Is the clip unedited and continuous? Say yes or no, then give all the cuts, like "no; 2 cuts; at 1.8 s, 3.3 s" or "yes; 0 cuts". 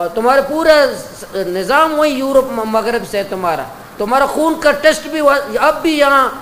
yes; 0 cuts